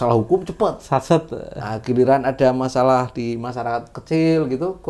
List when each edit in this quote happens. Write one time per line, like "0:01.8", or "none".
none